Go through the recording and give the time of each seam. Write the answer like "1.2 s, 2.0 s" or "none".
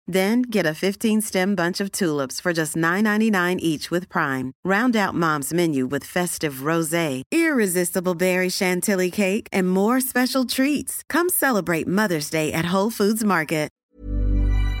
13.8 s